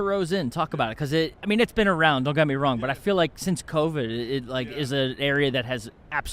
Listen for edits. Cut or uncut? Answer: cut